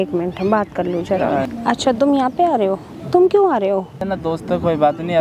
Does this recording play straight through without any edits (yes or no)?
no